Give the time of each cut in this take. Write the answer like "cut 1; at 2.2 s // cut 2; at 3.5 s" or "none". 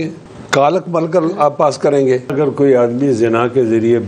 cut 1; at 2.3 s